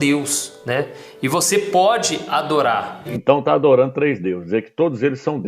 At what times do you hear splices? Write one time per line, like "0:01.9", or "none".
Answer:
0:03.1